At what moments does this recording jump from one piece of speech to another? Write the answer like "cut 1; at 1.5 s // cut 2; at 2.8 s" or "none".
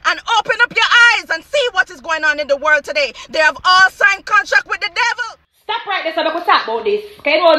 cut 1; at 5.6 s

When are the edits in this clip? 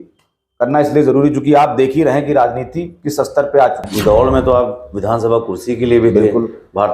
cut 1; at 3.9 s

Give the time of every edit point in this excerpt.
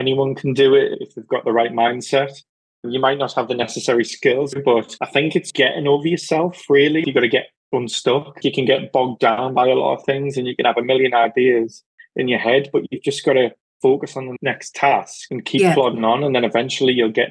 cut 1; at 4.5 s // cut 2; at 7.0 s // cut 3; at 8.4 s

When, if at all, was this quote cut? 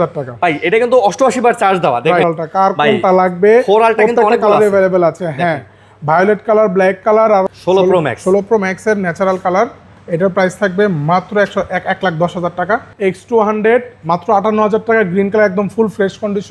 cut 1; at 2.3 s // cut 2; at 7.4 s // cut 3; at 12.9 s

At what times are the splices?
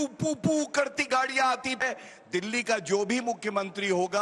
cut 1; at 1.8 s

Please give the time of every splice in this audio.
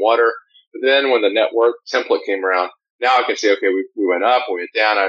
cut 1; at 1.8 s

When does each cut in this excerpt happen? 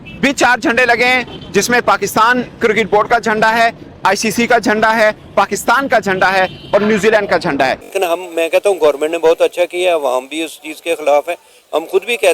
cut 1; at 7.9 s

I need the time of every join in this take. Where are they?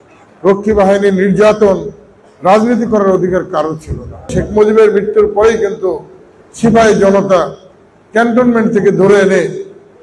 cut 1; at 4.3 s

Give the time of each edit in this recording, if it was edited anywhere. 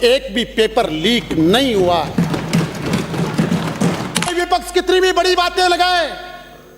cut 1; at 4.3 s

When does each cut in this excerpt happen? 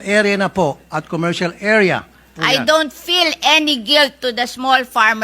cut 1; at 2.3 s

